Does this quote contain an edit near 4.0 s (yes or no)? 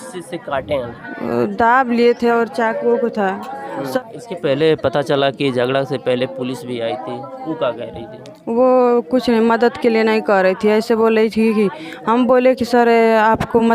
yes